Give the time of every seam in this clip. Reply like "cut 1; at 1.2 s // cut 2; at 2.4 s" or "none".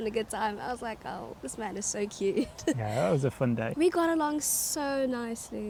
none